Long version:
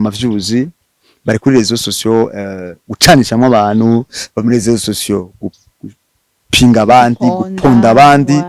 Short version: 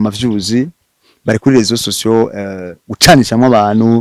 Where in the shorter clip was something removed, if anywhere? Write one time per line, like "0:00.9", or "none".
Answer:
none